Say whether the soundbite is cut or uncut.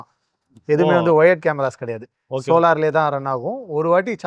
uncut